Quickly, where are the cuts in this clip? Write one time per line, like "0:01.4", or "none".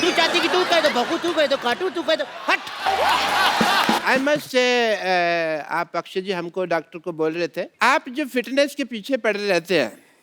0:04.0
0:07.7